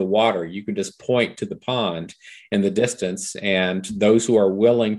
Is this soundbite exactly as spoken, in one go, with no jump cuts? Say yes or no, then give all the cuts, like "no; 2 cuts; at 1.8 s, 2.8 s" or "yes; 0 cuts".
yes; 0 cuts